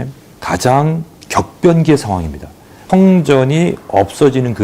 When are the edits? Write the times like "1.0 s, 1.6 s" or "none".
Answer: 2.8 s